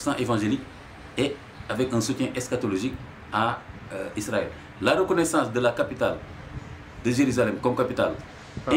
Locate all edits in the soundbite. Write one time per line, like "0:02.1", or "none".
none